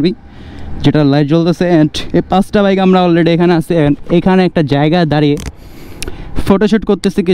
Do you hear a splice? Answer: no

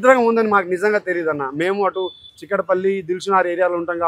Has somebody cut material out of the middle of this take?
no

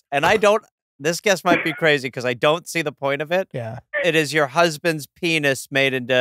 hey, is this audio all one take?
no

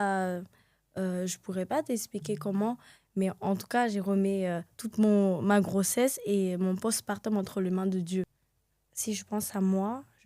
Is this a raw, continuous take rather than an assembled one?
no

